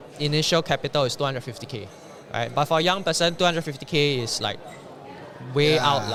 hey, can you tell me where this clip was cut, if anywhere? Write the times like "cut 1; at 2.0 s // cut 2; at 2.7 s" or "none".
none